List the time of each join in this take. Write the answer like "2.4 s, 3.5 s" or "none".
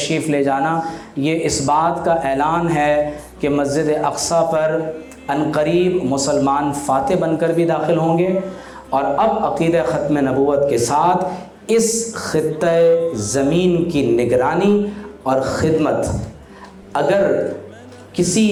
none